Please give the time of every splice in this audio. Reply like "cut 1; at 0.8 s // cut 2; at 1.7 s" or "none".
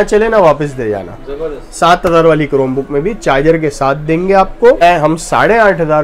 cut 1; at 4.8 s

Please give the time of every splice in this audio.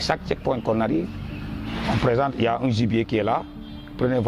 none

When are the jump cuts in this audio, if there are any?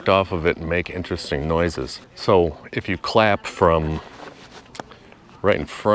cut 1; at 2.0 s

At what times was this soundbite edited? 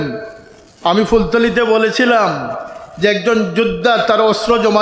none

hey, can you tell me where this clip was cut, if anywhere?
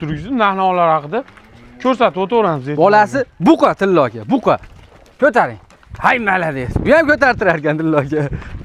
none

